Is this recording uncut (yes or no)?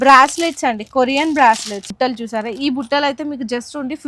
no